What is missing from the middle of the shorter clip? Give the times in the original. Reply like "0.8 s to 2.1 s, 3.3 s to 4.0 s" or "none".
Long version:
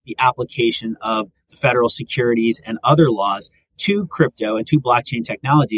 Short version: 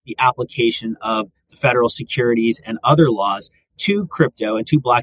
none